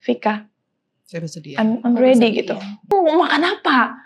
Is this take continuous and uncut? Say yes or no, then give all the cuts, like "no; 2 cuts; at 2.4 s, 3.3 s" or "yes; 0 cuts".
no; 1 cut; at 2.9 s